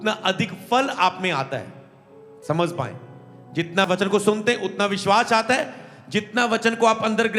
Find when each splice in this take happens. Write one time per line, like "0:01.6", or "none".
0:03.9